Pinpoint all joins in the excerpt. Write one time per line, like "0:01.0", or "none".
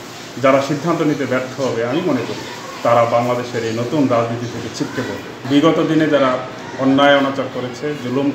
0:05.3